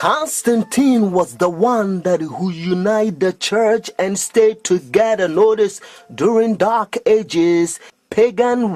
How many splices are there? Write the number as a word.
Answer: zero